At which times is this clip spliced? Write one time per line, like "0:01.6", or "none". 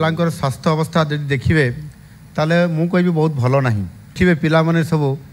0:04.1